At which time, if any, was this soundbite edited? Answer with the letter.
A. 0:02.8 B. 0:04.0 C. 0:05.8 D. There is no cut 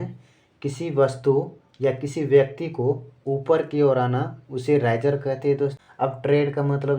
C